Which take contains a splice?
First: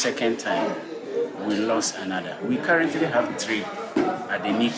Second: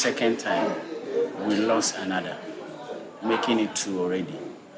first; 1 cut; at 2.4 s

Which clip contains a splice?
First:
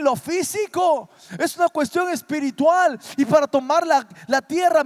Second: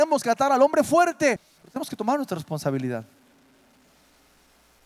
second; 1 cut; at 1.5 s

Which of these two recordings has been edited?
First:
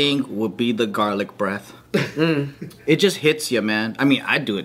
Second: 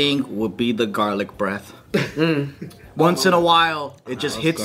first; 1 cut; at 2.7 s

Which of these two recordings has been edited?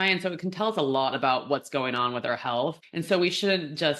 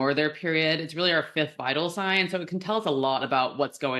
first; 1 cut; at 2.9 s

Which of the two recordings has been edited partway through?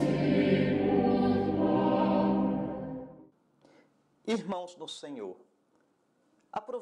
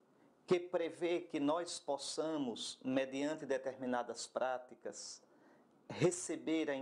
second; 1 cut; at 5.2 s

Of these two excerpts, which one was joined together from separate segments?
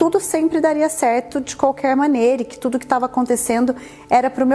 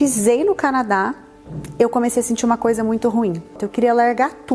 second; 1 cut; at 3.6 s

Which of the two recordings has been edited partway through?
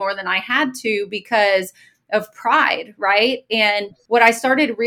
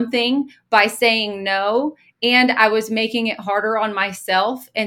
first; 1 cut; at 3.9 s

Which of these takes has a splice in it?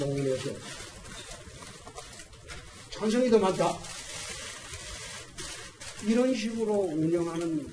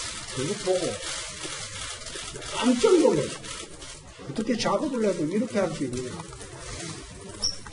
second; 1 cut; at 1.5 s

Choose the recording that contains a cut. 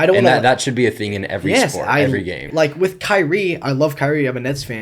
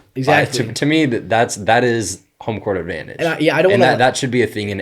first; 1 cut; at 2.4 s

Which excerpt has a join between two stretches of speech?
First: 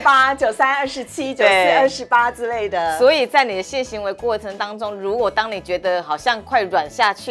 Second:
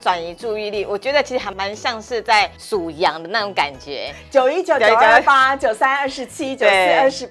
second; 2 cuts; at 1.5 s, 2.6 s

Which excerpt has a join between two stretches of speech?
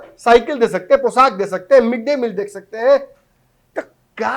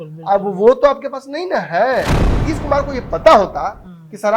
second; 1 cut; at 2.5 s

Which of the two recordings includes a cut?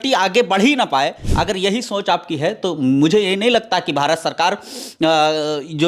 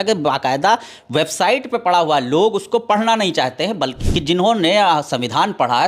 second; 1 cut; at 4.0 s

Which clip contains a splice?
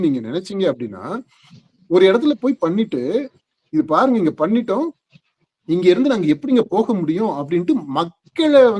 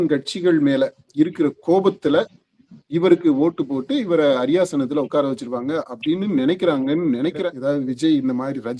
second; 1 cut; at 7.4 s

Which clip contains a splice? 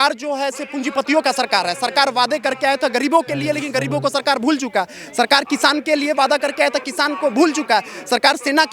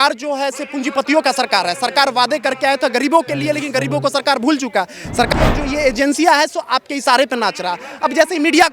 second; 1 cut; at 5.3 s

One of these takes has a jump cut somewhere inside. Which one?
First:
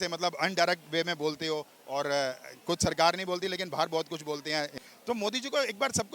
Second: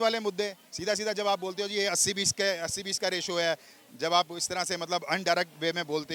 first; 1 cut; at 4.7 s

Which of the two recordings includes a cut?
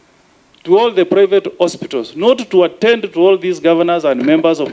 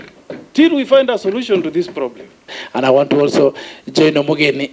second; 1 cut; at 2.6 s

